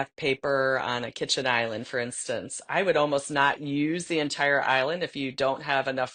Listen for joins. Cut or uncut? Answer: uncut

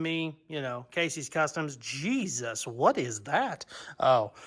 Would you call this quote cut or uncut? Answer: uncut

